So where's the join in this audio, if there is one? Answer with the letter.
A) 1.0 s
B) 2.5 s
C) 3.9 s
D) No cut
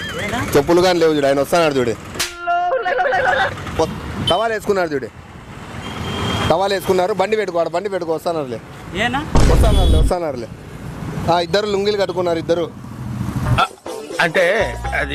C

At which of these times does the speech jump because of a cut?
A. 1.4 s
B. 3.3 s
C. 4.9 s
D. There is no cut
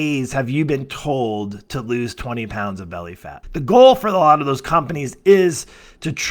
B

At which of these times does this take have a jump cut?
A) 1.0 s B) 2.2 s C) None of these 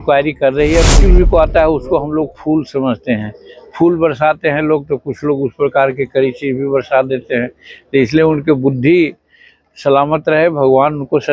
A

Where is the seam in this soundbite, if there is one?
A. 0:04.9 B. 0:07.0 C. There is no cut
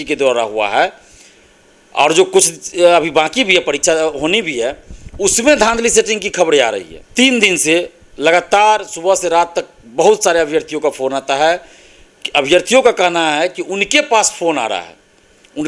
B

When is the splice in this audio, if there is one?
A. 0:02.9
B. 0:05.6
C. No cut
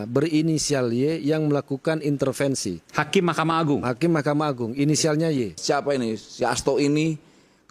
B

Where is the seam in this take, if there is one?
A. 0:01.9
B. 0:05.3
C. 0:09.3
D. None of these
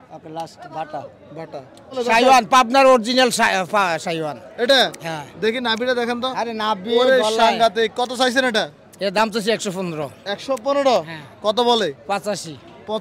A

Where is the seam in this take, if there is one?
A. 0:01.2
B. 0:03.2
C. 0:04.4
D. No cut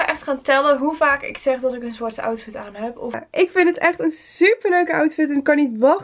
B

